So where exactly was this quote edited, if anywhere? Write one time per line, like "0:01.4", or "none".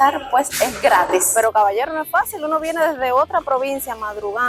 0:01.3